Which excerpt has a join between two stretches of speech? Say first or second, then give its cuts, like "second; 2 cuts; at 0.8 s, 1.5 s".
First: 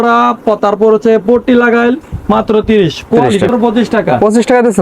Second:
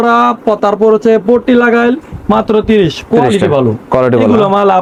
first; 1 cut; at 3.5 s